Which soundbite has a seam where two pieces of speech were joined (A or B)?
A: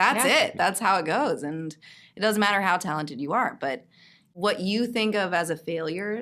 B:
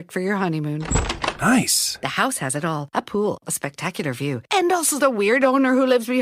A